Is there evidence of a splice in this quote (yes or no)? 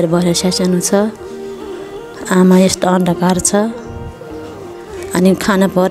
no